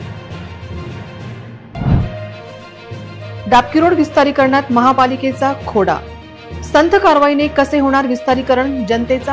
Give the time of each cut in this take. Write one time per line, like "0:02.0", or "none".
0:01.2